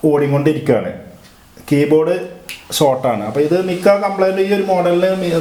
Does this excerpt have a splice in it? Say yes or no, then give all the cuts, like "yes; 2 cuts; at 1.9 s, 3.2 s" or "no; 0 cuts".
no; 0 cuts